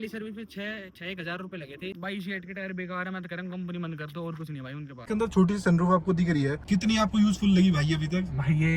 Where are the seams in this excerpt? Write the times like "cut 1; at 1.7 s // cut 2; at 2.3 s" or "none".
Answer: cut 1; at 2.0 s // cut 2; at 5.0 s